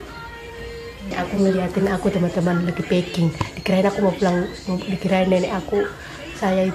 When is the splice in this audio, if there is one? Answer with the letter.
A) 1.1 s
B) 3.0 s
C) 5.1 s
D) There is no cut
A